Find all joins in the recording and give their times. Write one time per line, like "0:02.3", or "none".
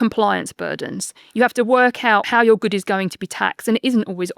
0:02.2